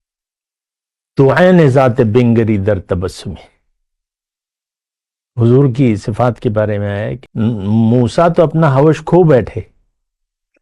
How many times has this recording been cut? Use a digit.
1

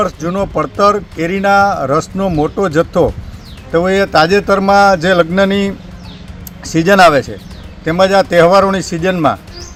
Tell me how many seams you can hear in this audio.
0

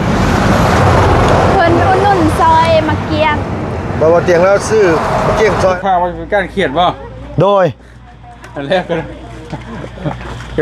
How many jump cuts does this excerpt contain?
1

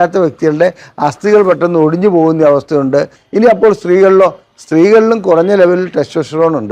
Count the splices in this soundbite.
1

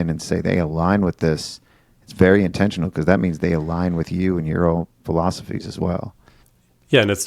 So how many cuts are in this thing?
0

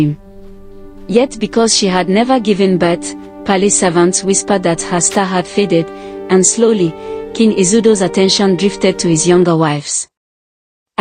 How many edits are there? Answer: 0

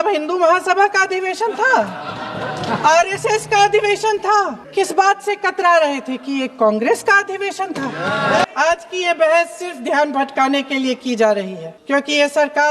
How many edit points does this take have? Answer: 1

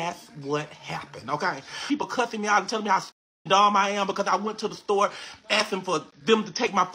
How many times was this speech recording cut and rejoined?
1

